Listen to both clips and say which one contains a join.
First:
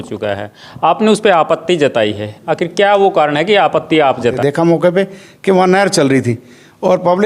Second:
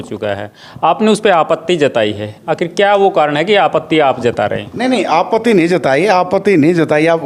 first; 1 cut; at 4.4 s

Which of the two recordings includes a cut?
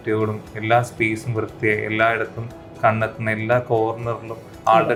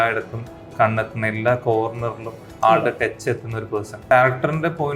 second; 1 cut; at 4.0 s

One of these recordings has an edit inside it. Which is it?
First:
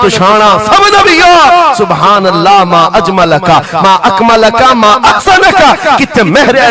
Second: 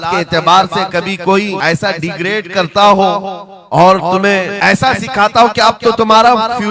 second; 2 cuts; at 1.6 s, 4.5 s

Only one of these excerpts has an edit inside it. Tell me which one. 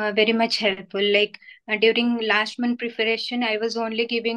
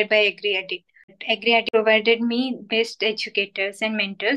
second; 1 cut; at 1.3 s

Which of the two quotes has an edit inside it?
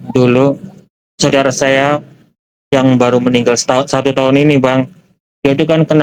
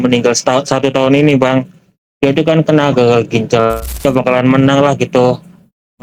second; 1 cut; at 4.0 s

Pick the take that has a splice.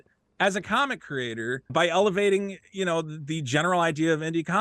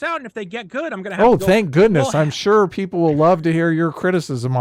first; 1 cut; at 1.7 s

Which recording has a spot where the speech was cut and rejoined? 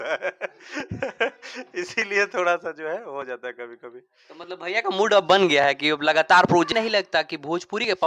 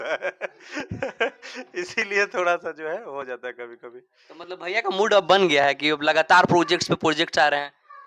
first; 1 cut; at 6.7 s

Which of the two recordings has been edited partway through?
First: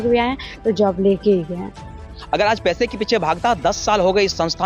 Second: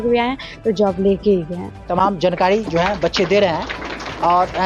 first; 1 cut; at 1.7 s

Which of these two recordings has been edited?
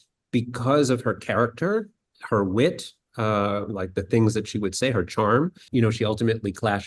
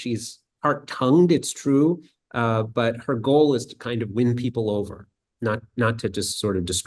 first; 1 cut; at 5.7 s

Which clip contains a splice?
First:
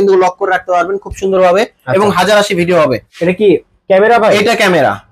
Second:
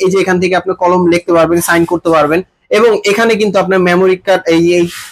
first; 1 cut; at 3.1 s

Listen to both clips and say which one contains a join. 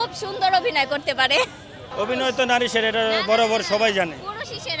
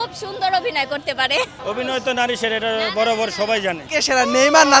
second; 2 cuts; at 1.6 s, 3.8 s

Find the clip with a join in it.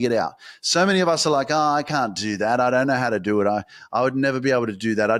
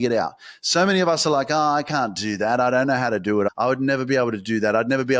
second; 1 cut; at 3.5 s

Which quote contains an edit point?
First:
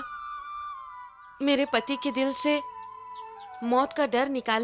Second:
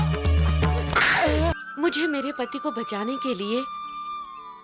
second; 1 cut; at 1.6 s

